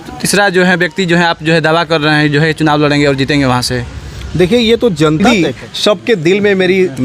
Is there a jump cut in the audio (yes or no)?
yes